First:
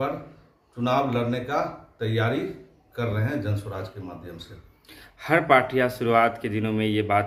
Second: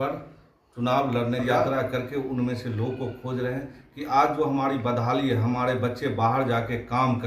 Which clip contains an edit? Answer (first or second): second